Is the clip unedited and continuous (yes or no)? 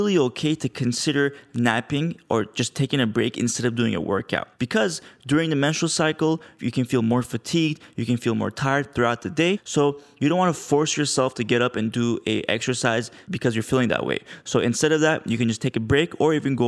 no